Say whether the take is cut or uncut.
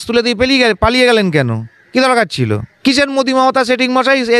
cut